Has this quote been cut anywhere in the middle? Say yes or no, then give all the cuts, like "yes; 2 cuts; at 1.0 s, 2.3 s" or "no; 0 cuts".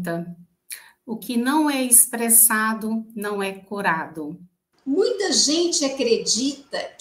yes; 1 cut; at 4.7 s